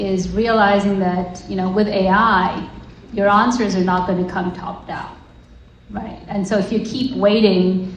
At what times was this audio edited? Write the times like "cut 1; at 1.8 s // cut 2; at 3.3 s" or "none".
none